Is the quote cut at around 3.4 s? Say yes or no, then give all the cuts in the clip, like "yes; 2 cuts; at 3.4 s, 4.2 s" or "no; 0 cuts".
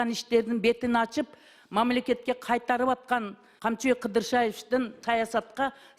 yes; 2 cuts; at 3.4 s, 5.0 s